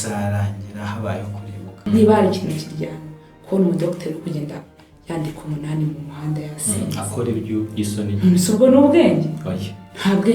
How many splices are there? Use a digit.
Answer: 1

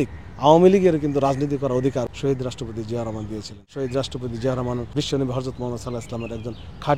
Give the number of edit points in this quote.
3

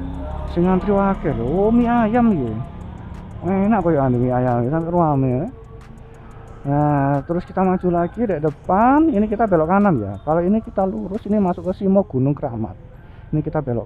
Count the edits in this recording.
0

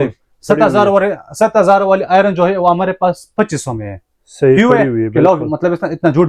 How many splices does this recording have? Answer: 0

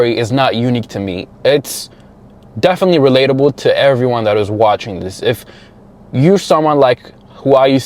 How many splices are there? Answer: 0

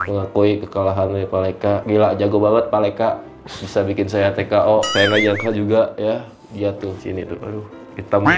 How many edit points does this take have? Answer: 2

